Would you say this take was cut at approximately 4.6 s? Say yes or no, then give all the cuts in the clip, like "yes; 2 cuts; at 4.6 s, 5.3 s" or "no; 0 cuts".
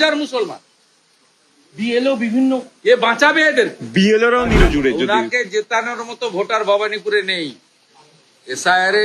yes; 1 cut; at 4.6 s